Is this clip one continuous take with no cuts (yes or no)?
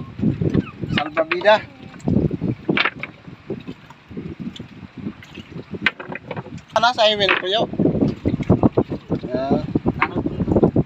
no